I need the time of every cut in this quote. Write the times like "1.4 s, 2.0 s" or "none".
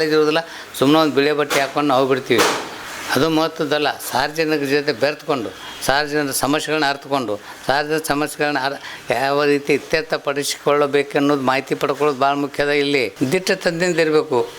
13.1 s